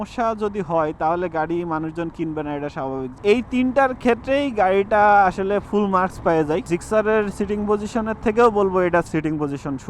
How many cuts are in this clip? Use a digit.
3